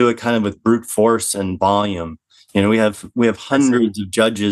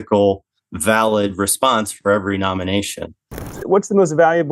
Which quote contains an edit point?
second; 1 cut; at 3.6 s

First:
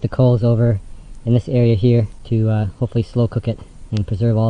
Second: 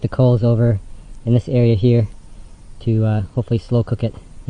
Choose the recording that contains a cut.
first; 1 cut; at 2.2 s

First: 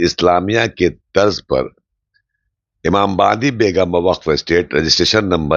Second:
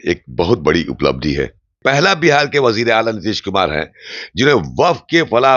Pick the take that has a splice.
second; 1 cut; at 1.8 s

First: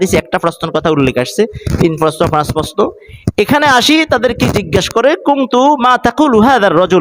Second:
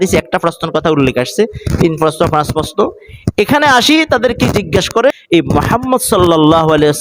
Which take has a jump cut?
second; 1 cut; at 5.2 s

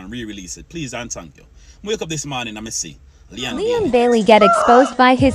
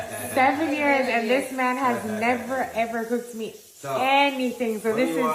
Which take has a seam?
first; 1 cut; at 3.7 s

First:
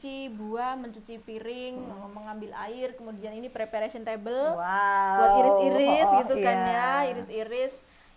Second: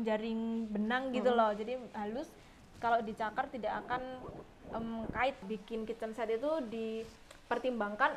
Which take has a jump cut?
second; 1 cut; at 5.4 s

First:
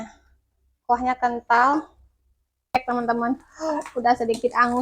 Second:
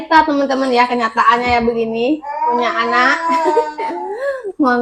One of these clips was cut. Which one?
first; 1 cut; at 2.8 s

